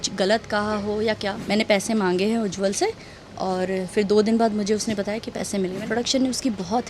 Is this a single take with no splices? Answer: no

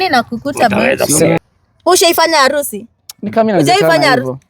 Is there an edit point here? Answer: yes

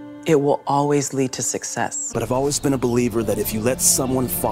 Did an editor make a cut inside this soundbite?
yes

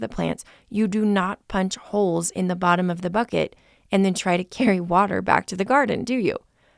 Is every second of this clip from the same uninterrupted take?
yes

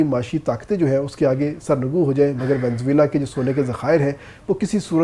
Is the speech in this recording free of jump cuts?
yes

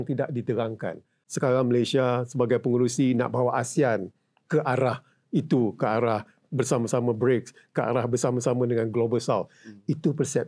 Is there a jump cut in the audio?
yes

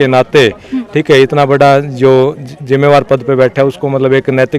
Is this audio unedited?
yes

